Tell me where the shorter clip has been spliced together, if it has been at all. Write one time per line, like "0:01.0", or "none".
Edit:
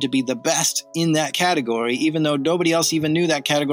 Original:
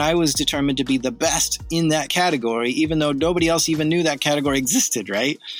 none